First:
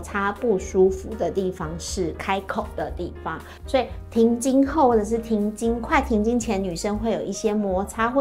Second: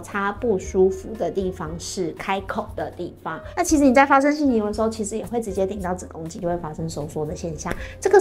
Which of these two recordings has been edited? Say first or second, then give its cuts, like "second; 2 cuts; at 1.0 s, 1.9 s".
second; 2 cuts; at 3.4 s, 6.4 s